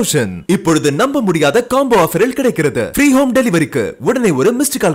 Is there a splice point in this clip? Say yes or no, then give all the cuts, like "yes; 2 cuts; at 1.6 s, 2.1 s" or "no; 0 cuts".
no; 0 cuts